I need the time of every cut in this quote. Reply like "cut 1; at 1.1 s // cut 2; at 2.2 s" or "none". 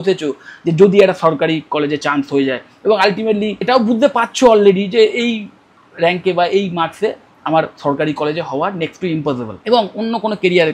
cut 1; at 2.0 s // cut 2; at 3.6 s // cut 3; at 9.5 s